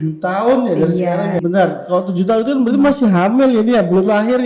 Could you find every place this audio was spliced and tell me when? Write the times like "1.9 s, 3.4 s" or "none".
1.4 s